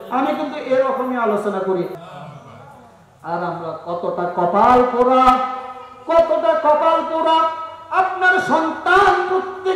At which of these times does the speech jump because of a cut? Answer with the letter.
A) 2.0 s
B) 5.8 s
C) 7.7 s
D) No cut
A